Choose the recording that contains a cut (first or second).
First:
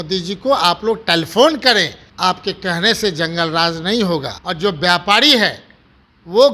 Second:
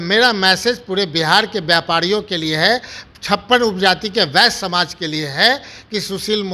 first